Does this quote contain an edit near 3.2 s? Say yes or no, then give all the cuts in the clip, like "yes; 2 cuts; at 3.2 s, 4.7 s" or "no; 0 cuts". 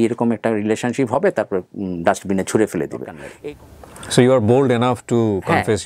yes; 1 cut; at 3.2 s